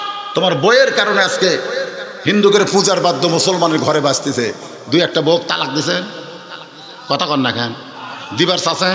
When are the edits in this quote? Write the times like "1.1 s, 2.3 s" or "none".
none